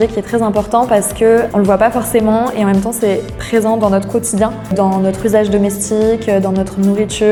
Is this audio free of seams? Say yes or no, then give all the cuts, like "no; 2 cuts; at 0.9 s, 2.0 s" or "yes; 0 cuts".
yes; 0 cuts